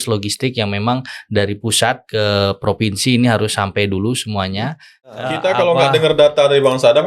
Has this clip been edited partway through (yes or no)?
yes